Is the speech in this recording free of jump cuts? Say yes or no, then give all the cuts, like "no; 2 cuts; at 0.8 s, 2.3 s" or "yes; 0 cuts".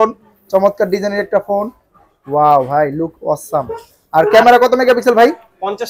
yes; 0 cuts